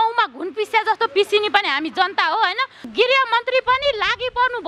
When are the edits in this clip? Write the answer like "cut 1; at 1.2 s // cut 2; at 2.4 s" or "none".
cut 1; at 2.8 s